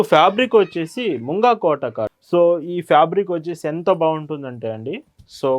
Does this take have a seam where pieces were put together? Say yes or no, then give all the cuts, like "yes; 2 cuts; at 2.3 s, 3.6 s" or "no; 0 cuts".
yes; 1 cut; at 2.2 s